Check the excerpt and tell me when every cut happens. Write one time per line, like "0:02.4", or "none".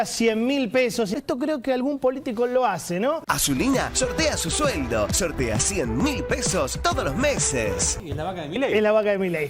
0:01.2
0:03.2
0:07.9